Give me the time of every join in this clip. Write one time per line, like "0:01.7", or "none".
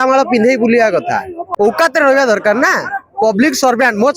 0:01.5